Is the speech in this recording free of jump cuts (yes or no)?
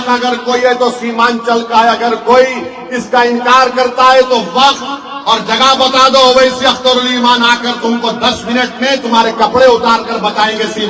yes